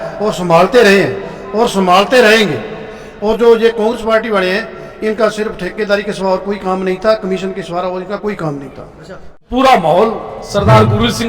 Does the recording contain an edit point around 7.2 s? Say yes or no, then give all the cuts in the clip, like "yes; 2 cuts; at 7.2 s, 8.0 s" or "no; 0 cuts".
no; 1 cut; at 9.5 s